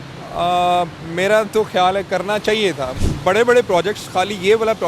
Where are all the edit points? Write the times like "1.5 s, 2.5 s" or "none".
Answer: 3.0 s